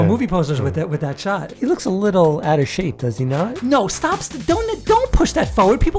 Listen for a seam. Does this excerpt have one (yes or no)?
yes